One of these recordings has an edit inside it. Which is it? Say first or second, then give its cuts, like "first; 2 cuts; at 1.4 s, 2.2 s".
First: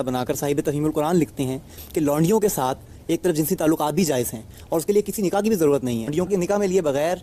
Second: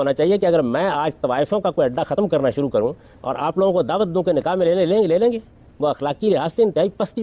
first; 1 cut; at 6.1 s